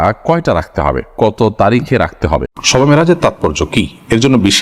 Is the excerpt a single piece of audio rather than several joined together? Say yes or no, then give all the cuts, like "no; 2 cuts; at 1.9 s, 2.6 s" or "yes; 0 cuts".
no; 1 cut; at 2.5 s